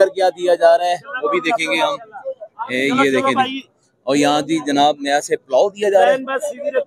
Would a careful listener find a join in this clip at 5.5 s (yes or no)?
no